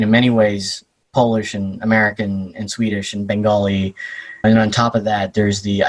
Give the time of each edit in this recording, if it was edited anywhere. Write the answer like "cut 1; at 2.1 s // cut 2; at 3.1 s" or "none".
none